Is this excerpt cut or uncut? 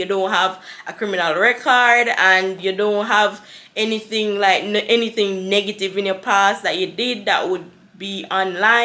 uncut